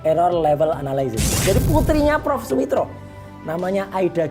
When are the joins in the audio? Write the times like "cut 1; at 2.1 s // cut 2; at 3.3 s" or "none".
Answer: cut 1; at 1.4 s